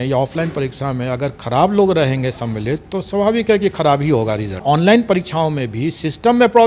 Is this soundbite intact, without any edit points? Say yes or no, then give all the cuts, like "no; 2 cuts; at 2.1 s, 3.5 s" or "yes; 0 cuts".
no; 1 cut; at 4.6 s